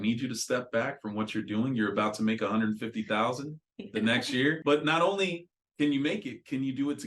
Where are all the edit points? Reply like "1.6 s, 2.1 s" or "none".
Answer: 4.6 s

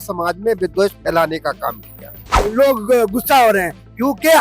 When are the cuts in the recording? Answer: 2.4 s

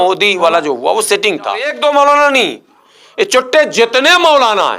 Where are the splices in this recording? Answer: 1.7 s

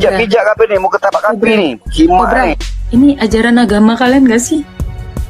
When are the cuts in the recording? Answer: 2.7 s

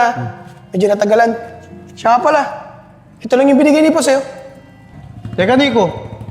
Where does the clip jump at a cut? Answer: none

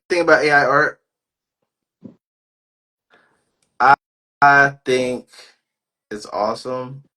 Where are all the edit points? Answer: none

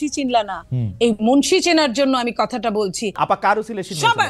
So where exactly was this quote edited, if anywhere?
3.2 s

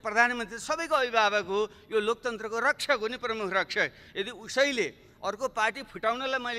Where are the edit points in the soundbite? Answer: none

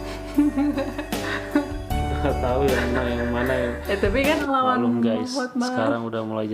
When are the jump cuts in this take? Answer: 4.4 s

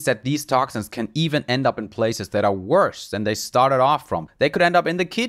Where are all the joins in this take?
4.3 s

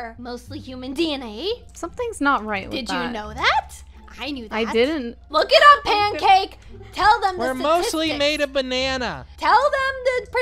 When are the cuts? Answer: none

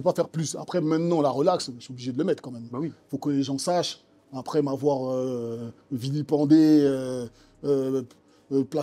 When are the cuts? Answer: none

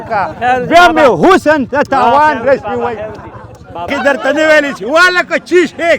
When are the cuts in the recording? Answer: 3.9 s

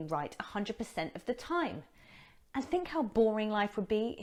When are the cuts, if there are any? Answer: none

